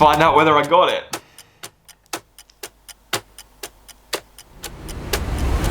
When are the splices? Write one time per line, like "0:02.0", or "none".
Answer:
0:01.1